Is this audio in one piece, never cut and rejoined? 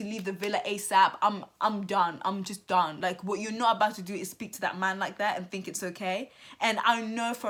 yes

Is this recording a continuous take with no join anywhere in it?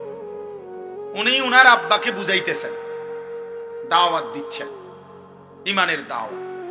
no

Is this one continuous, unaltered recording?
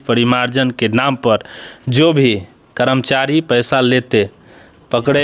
yes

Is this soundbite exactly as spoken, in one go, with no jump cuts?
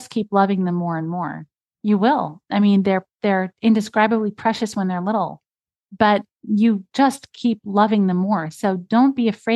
yes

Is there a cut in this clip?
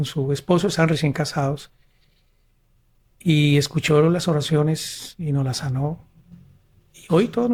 no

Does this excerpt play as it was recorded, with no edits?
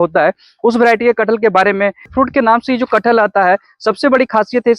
no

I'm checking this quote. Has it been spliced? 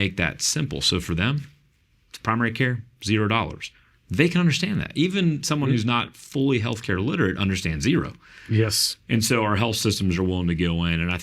no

